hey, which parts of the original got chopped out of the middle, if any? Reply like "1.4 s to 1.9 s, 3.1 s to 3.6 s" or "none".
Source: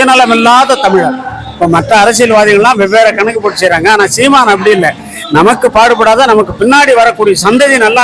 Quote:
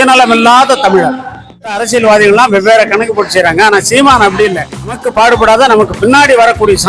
1.6 s to 1.9 s, 5.4 s to 5.7 s